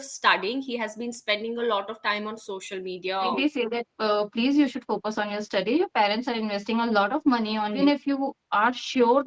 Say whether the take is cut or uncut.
cut